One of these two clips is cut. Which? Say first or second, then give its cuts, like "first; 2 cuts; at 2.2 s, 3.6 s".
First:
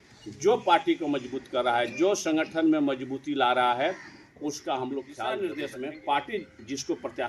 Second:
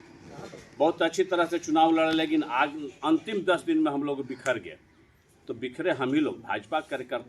first; 1 cut; at 5.4 s